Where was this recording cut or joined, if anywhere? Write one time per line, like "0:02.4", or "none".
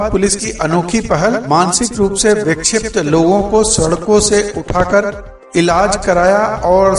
none